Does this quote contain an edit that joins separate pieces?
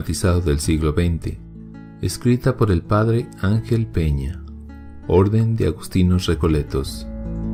no; 0 cuts

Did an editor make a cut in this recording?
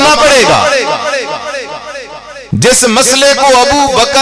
yes; 1 cut; at 2.3 s

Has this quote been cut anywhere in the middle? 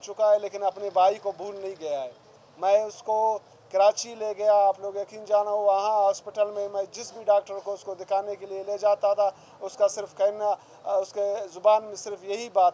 no; 0 cuts

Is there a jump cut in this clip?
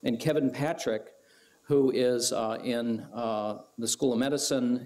yes; 1 cut; at 3.1 s

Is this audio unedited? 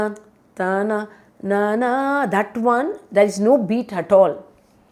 yes; 0 cuts

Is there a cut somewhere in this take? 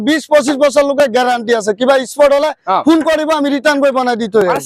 no; 0 cuts

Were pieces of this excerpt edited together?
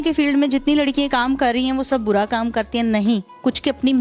no; 0 cuts

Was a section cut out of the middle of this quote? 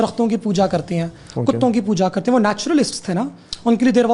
no; 0 cuts

